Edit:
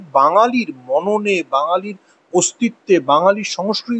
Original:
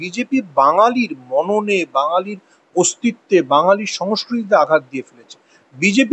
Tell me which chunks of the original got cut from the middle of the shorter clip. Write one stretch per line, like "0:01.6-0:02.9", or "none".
none